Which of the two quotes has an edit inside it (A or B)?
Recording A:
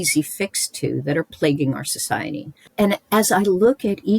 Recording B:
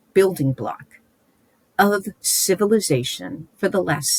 A